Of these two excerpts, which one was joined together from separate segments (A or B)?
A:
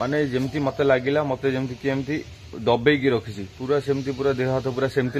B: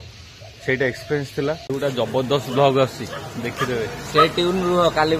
B